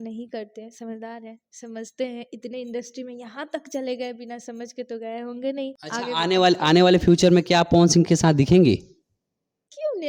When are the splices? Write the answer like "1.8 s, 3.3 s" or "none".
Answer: 5.8 s

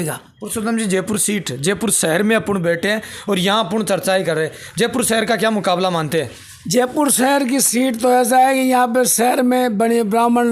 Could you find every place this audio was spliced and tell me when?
none

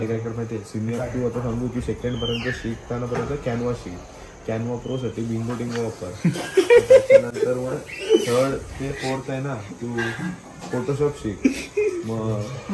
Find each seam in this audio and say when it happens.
none

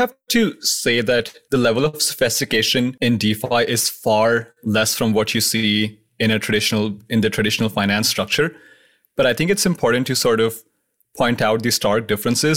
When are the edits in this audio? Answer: 1.4 s, 2.9 s

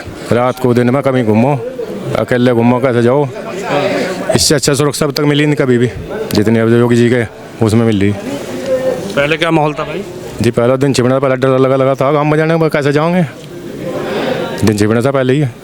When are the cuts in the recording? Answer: none

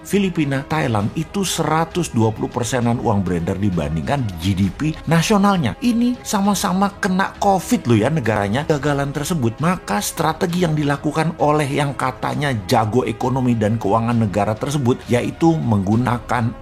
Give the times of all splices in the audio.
8.6 s

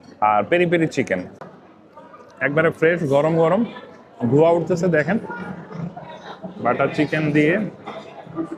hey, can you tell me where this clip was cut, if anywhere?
1.4 s

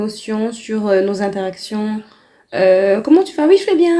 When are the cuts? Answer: none

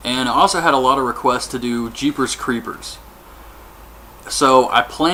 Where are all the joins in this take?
none

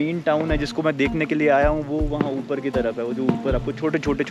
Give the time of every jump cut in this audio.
none

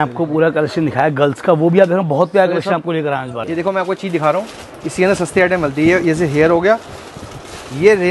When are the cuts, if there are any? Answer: 3.4 s

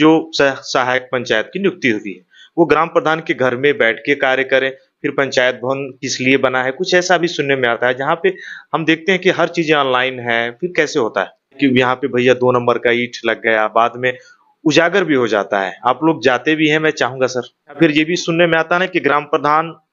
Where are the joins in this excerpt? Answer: 11.6 s, 17.8 s

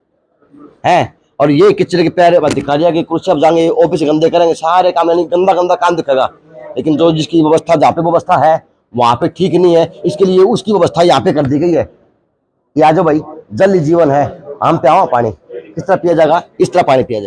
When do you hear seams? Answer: none

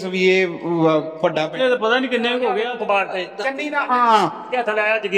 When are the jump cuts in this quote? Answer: 2.6 s

